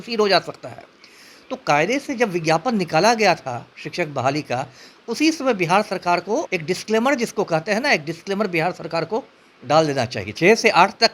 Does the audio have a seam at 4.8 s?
no; 2 cuts; at 6.5 s, 10.2 s

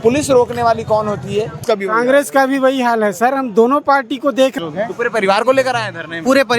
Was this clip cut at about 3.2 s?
no; 2 cuts; at 1.6 s, 4.5 s

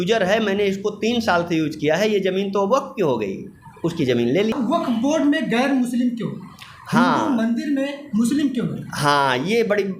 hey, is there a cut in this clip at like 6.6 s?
no; 1 cut; at 4.5 s

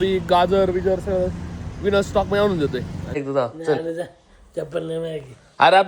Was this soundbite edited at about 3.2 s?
yes; 1 cut; at 3.2 s

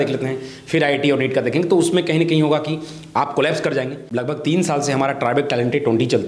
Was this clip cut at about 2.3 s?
no; 1 cut; at 4.1 s

